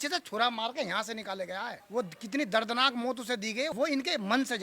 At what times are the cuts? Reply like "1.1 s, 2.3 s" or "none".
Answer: 1.8 s, 3.7 s